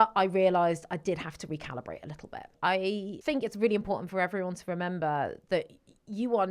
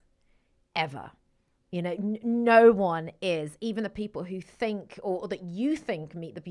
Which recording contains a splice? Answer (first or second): first